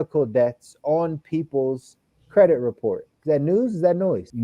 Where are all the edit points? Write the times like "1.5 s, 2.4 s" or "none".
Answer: 3.1 s

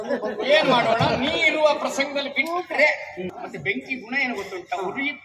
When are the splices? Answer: 3.4 s

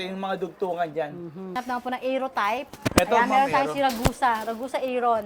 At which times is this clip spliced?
1.5 s

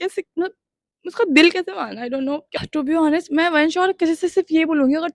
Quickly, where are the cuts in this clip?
2.7 s

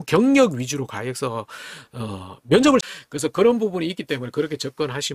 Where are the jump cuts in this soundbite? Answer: 2.8 s

